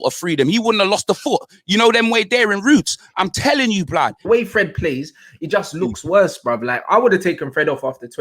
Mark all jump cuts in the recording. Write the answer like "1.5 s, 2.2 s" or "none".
4.2 s